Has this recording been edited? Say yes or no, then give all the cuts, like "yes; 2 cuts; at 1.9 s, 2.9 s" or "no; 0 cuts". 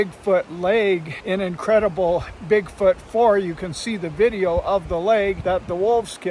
yes; 2 cuts; at 1.1 s, 5.4 s